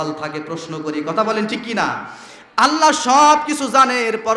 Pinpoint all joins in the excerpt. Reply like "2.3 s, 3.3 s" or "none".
none